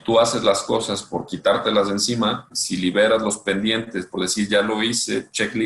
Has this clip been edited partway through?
yes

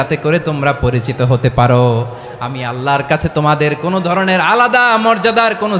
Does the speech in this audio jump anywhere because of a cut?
no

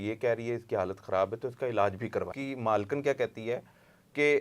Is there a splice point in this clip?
yes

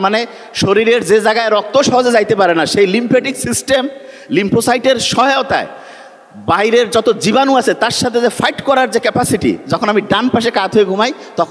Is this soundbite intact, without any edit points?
yes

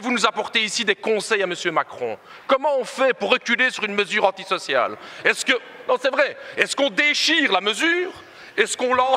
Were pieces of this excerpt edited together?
no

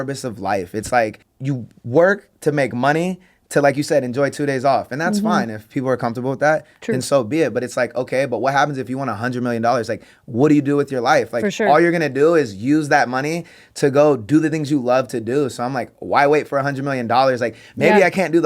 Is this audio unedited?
no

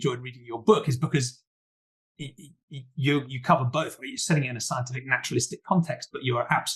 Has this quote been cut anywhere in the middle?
no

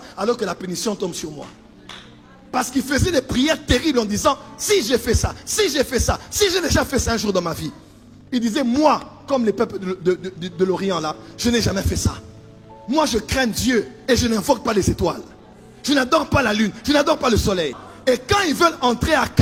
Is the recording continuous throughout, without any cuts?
yes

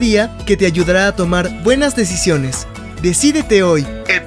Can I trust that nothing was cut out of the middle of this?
no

